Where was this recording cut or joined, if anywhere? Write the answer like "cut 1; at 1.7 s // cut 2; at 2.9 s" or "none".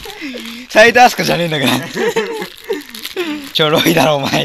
cut 1; at 3.5 s